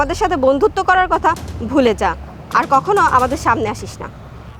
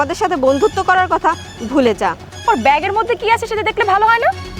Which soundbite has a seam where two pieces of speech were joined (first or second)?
second